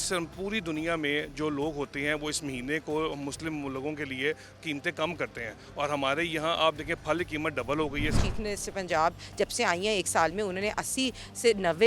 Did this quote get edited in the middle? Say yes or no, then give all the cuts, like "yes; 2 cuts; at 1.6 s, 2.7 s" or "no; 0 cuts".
yes; 1 cut; at 8.1 s